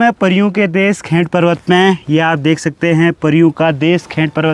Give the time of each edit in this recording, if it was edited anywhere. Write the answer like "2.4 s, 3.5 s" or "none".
none